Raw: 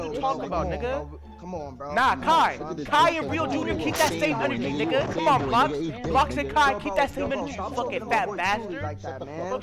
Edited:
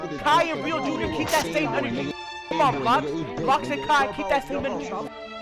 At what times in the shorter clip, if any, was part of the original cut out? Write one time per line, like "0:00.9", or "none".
none